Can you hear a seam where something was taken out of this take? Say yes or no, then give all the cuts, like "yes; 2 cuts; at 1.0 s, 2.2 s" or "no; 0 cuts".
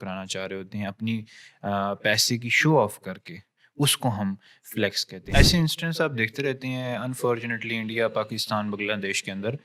yes; 1 cut; at 5.1 s